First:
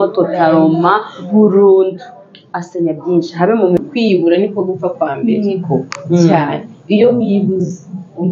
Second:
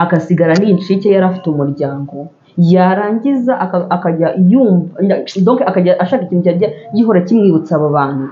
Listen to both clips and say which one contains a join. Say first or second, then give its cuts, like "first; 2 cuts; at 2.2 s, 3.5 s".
first; 1 cut; at 3.8 s